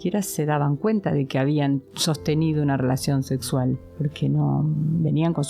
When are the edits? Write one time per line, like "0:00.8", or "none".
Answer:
0:01.9